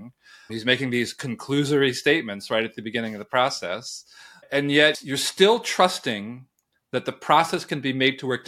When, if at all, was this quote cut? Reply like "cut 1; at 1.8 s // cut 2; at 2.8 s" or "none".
none

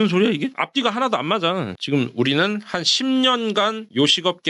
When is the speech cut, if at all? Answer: cut 1; at 1.7 s

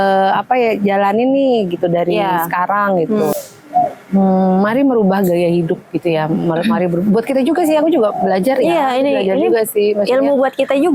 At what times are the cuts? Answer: cut 1; at 3.3 s

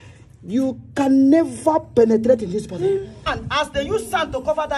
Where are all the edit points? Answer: cut 1; at 3.4 s

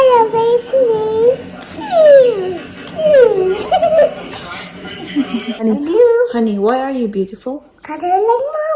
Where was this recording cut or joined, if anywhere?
cut 1; at 5.5 s

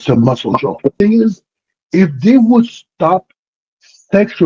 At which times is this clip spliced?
cut 1; at 1.0 s

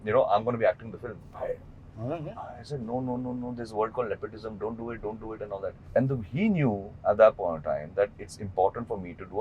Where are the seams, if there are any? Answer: cut 1; at 1.2 s // cut 2; at 5.8 s

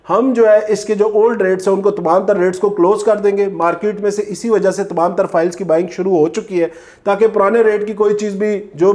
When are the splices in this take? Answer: none

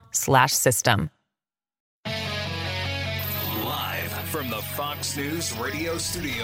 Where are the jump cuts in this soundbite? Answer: cut 1; at 1.8 s // cut 2; at 3.4 s

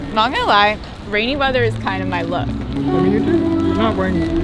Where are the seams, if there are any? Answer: none

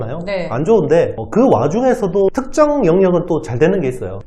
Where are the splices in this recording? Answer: cut 1; at 2.3 s

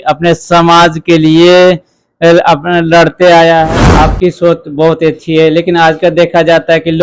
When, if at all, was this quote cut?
cut 1; at 3.6 s

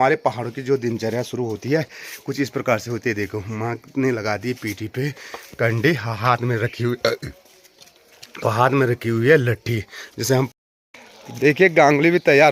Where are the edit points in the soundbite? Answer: none

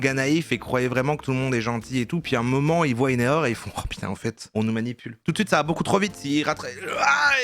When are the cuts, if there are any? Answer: cut 1; at 5.2 s

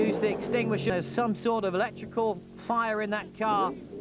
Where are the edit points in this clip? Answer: cut 1; at 0.9 s

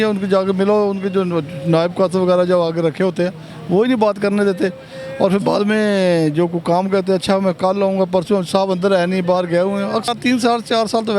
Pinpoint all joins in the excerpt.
cut 1; at 10.1 s

